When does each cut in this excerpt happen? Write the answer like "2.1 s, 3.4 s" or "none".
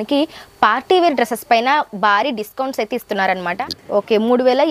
3.5 s